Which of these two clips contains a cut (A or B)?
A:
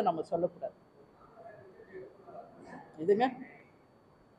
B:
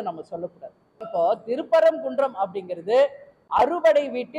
B